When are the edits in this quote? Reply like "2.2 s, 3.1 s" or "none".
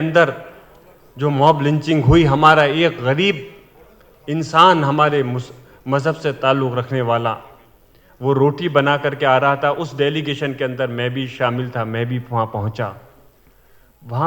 none